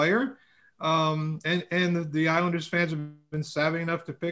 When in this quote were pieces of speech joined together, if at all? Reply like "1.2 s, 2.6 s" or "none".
none

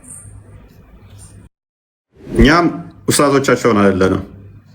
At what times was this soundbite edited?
2.3 s

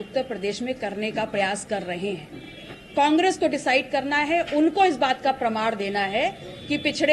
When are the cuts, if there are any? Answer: 2.8 s

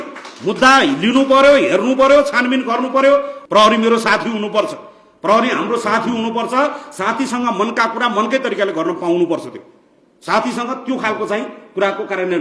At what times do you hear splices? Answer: 3.4 s

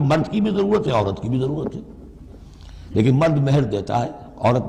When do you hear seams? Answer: none

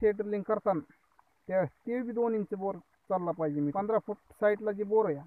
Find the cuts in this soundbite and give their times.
3.7 s

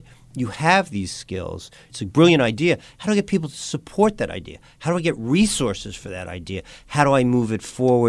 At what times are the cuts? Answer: 1.9 s

